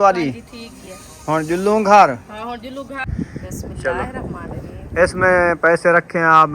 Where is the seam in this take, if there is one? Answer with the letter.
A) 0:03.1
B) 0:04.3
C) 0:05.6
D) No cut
A